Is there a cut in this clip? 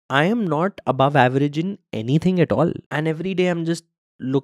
yes; 1 cut; at 2.8 s

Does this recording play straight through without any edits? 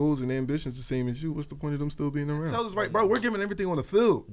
no; 1 cut; at 2.7 s

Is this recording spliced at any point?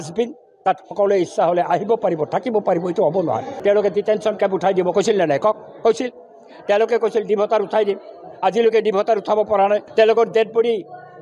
yes; 2 cuts; at 3.5 s, 9.9 s

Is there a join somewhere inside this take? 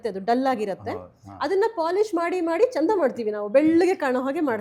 no; 0 cuts

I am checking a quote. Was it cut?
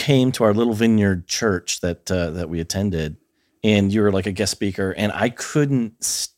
no; 0 cuts

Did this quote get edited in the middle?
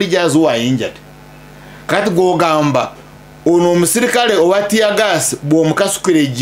no; 0 cuts

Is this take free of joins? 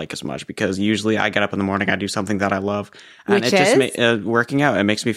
yes; 0 cuts

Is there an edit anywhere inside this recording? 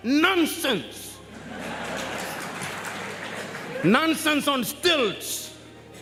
no; 0 cuts

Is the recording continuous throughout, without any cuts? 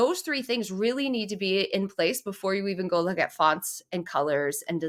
yes; 0 cuts

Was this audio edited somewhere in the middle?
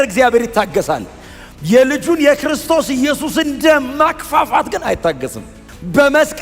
no; 0 cuts

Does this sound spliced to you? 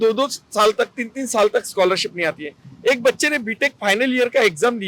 no; 0 cuts

